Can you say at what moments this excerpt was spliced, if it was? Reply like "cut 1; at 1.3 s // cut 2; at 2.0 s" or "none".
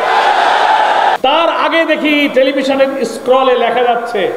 cut 1; at 1.2 s